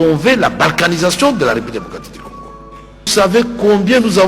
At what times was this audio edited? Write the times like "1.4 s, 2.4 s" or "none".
3.1 s